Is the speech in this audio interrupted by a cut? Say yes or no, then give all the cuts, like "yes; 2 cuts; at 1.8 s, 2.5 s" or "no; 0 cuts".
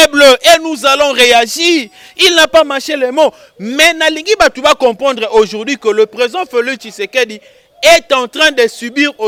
no; 0 cuts